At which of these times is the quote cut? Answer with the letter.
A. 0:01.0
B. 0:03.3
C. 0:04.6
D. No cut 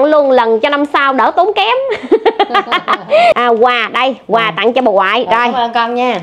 B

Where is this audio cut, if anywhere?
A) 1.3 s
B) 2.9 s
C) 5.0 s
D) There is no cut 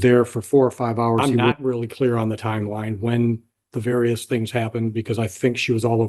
A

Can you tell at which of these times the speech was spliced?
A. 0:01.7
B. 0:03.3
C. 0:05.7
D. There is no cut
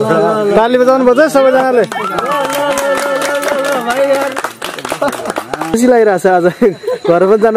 C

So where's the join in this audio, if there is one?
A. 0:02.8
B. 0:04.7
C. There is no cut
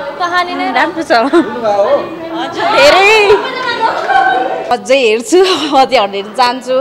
B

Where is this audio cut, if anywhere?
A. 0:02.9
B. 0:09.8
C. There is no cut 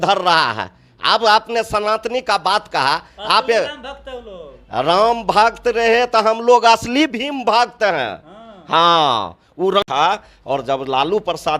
B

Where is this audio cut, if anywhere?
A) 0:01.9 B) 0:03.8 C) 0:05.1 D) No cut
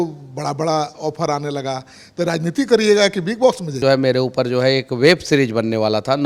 B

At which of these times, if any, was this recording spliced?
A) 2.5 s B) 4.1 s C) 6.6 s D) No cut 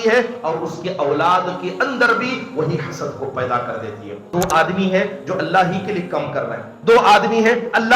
B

